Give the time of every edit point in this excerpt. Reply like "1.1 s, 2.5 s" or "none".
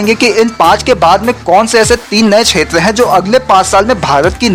none